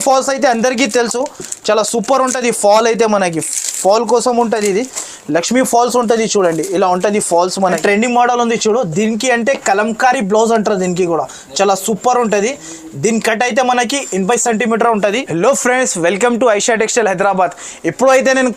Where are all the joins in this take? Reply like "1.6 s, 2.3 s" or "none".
7.8 s, 15.2 s